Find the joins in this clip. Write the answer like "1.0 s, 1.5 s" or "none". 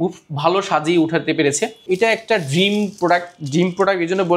1.8 s